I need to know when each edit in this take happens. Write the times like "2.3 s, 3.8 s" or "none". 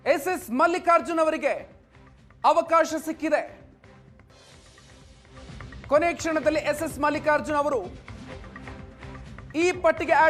none